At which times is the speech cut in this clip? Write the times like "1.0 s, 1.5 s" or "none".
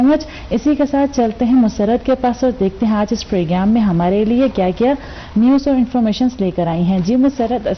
none